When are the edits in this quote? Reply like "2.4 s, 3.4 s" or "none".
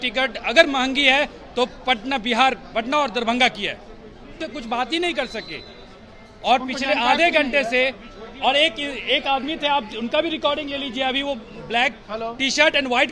4.5 s